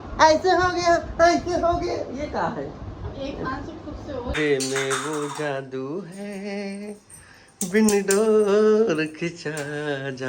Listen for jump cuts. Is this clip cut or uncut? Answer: cut